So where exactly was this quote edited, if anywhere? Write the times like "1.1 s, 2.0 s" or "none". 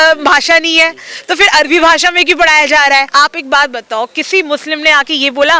3.1 s